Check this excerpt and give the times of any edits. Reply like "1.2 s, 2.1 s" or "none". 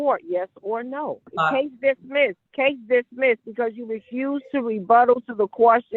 1.3 s, 2.4 s